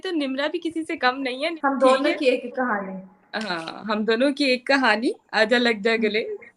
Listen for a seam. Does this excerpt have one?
yes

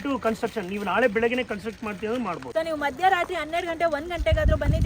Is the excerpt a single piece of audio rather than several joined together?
no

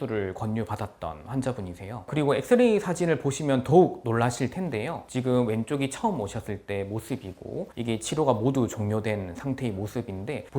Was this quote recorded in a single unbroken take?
no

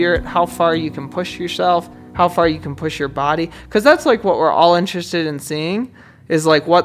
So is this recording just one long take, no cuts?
no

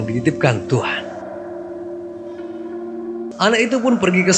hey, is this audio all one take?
no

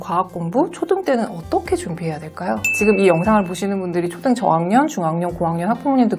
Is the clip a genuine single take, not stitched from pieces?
no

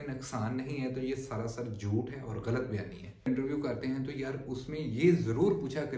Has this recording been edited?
yes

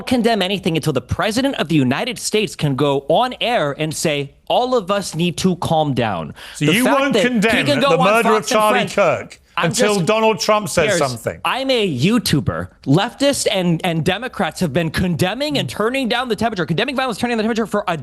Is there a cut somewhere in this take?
yes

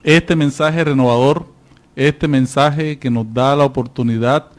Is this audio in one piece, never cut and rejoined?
no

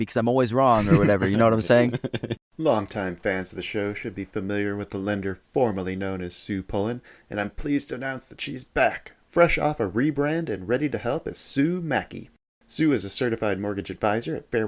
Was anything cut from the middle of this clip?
yes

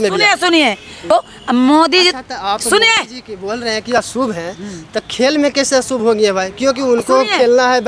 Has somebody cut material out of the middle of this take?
yes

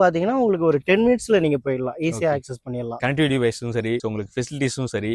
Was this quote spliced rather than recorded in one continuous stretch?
no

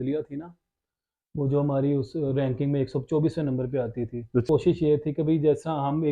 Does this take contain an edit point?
yes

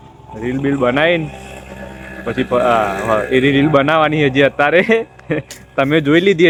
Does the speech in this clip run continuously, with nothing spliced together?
yes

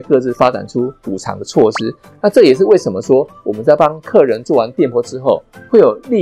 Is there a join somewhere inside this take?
yes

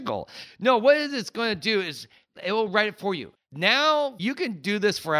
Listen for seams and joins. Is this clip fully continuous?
no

